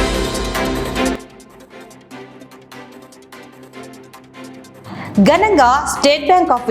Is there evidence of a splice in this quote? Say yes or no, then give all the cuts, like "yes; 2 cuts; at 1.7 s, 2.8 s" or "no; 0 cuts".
yes; 1 cut; at 1.1 s